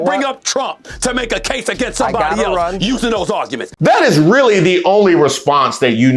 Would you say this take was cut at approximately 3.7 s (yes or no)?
yes